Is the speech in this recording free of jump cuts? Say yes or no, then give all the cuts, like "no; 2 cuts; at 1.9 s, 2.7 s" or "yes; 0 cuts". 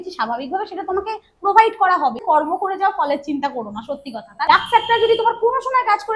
no; 2 cuts; at 2.2 s, 4.3 s